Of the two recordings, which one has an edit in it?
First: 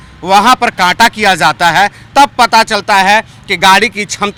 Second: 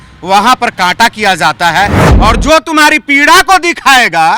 second; 1 cut; at 2.0 s

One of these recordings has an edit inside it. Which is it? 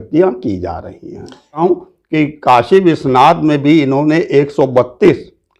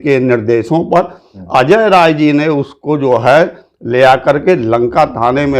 first; 1 cut; at 1.6 s

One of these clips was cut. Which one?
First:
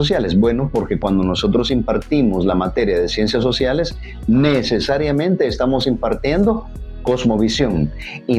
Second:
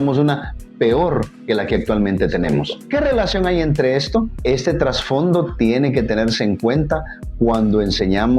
second; 1 cut; at 2.7 s

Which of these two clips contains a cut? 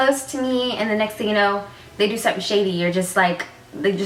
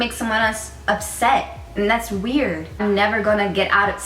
second; 1 cut; at 2.8 s

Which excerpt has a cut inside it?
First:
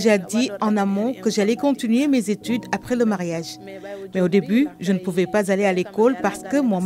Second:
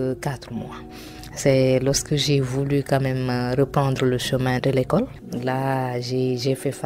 second; 1 cut; at 5.2 s

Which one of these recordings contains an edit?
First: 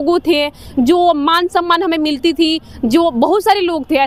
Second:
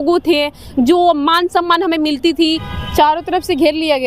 second; 1 cut; at 2.7 s

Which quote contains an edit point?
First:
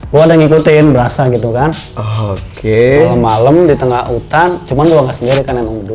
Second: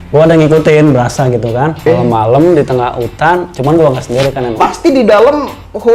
second; 2 cuts; at 1.9 s, 4.5 s

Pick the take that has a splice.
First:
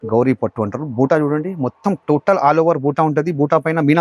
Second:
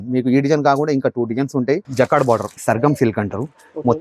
second; 2 cuts; at 1.9 s, 2.5 s

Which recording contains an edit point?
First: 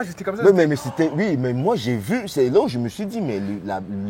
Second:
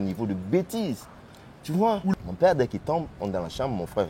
second; 1 cut; at 2.1 s

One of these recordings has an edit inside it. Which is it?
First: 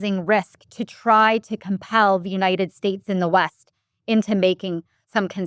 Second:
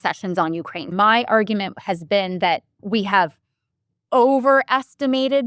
second; 2 cuts; at 0.9 s, 2.8 s

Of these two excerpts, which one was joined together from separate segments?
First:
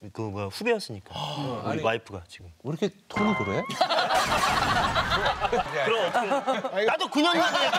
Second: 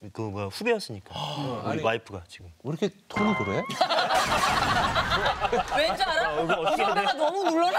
first; 1 cut; at 5.7 s

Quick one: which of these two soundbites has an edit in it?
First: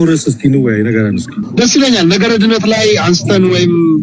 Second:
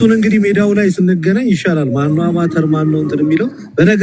first; 1 cut; at 1.4 s

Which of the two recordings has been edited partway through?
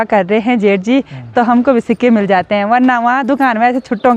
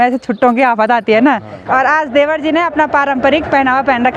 second; 1 cut; at 1.6 s

